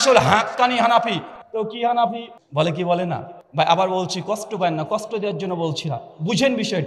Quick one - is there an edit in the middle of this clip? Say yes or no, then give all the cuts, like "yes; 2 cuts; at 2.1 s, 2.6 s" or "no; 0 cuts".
yes; 2 cuts; at 2.3 s, 3.4 s